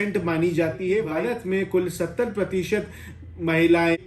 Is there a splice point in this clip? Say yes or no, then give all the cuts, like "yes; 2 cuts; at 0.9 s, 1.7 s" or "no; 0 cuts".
yes; 1 cut; at 1.1 s